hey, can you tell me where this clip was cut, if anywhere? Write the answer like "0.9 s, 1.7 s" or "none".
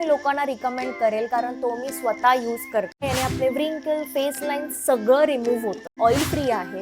3.0 s, 5.8 s